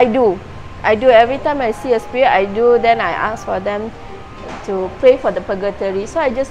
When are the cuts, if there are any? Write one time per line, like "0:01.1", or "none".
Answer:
none